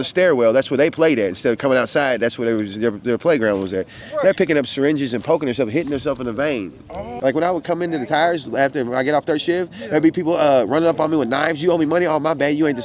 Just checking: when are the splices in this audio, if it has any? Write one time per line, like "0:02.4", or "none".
0:07.1